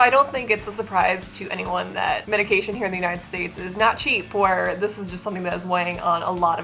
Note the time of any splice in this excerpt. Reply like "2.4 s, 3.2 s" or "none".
2.2 s